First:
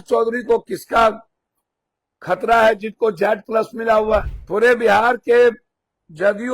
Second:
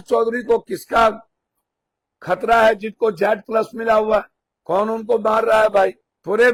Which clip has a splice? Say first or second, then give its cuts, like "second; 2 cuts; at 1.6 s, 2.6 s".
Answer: first; 1 cut; at 4.4 s